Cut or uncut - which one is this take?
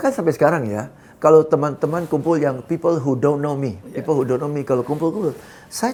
uncut